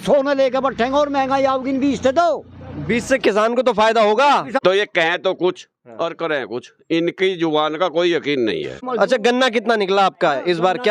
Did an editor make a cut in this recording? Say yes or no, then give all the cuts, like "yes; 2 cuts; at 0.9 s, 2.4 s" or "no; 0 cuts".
yes; 2 cuts; at 4.5 s, 8.9 s